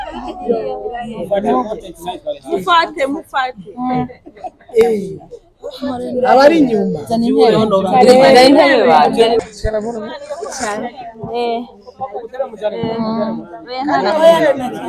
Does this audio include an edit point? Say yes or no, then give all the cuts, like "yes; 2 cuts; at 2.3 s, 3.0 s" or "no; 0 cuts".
yes; 1 cut; at 9.4 s